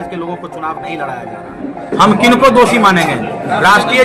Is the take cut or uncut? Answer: cut